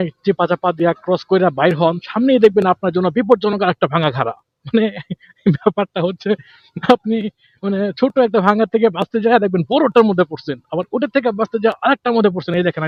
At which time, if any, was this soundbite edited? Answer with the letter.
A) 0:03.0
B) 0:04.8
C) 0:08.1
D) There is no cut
D